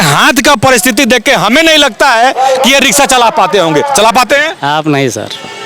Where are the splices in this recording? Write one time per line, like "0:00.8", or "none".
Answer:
none